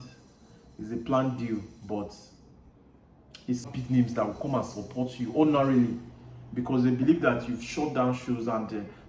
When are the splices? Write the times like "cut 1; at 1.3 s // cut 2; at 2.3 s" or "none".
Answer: cut 1; at 3.6 s